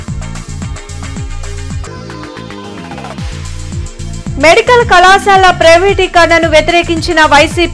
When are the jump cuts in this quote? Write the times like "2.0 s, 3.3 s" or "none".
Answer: 4.2 s